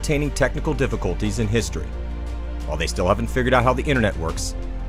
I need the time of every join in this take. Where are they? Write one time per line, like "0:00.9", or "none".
none